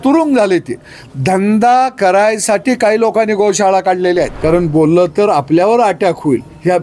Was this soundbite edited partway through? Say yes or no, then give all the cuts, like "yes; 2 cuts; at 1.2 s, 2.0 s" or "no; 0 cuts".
yes; 1 cut; at 4.3 s